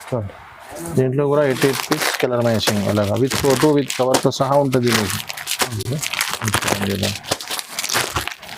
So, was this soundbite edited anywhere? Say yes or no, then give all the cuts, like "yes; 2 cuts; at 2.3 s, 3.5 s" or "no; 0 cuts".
no; 0 cuts